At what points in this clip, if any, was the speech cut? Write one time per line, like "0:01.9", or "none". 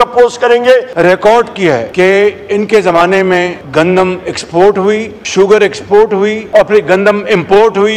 0:00.9
0:01.9
0:03.6
0:05.2
0:06.4